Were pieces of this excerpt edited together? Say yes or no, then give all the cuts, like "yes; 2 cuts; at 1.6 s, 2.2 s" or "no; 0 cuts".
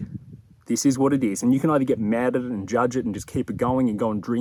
no; 0 cuts